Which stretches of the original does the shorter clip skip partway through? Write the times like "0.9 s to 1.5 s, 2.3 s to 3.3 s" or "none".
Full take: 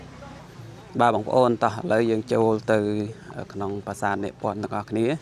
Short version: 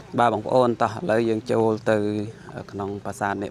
none

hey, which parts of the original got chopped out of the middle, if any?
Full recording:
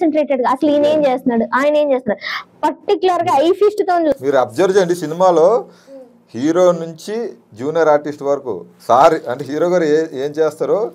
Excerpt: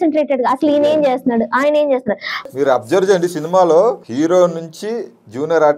2.5 s to 4.2 s, 5.7 s to 6.3 s

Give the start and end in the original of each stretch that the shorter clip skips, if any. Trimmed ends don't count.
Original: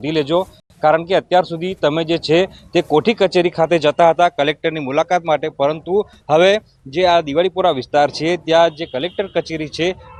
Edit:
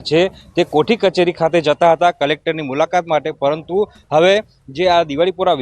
none

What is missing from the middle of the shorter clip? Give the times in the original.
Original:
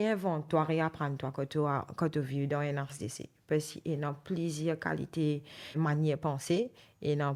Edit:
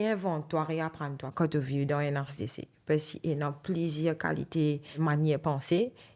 1.3 s to 1.9 s, 5.5 s to 5.7 s

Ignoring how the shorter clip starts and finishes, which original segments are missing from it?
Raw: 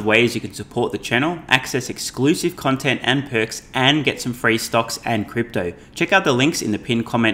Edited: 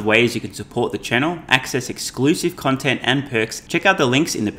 3.6 s to 5.9 s

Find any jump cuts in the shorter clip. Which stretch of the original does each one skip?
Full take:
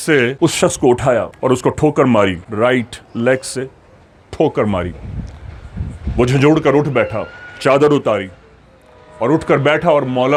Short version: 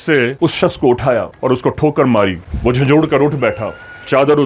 2.4 s to 6.0 s

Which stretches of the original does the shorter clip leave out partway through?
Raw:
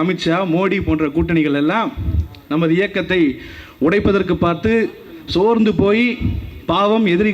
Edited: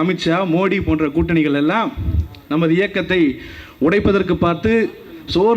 none

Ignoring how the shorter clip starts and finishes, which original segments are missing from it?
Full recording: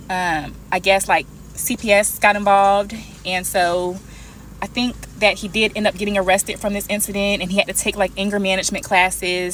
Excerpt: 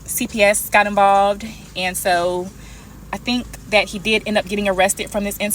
none

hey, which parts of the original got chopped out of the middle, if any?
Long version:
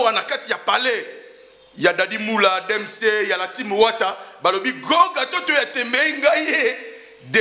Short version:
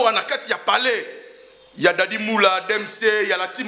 none

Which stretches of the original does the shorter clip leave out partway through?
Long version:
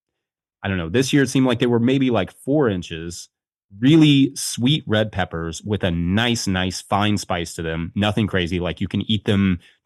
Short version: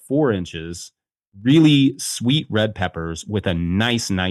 none

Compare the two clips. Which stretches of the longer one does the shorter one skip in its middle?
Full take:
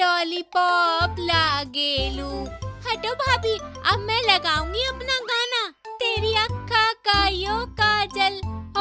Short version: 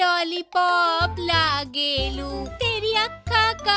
2.5 s to 5.9 s

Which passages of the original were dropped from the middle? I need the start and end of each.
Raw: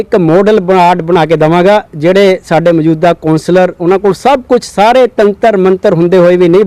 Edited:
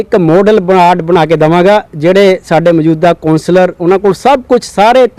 none

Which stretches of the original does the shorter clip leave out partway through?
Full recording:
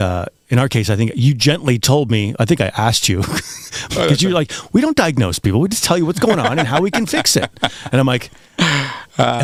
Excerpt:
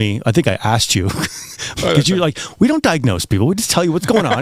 none

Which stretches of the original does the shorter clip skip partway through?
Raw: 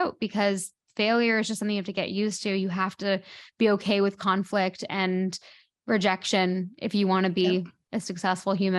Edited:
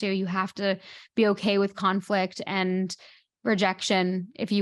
none

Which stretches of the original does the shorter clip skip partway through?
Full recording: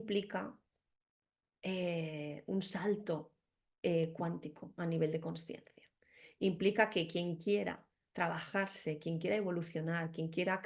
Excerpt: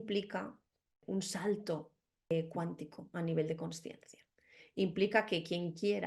1.0 s to 2.4 s, 3.7 s to 3.9 s

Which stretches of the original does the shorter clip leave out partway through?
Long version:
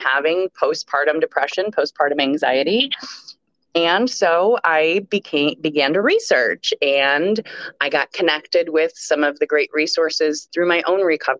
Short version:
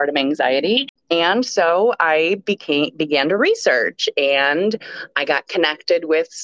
3.0 s to 3.6 s

